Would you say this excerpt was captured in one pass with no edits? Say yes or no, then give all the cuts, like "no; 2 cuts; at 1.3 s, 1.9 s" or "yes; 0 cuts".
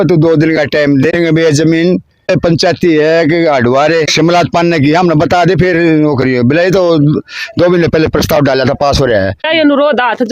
no; 4 cuts; at 1.1 s, 2.3 s, 4.1 s, 9.4 s